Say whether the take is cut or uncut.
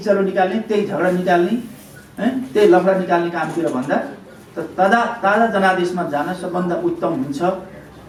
uncut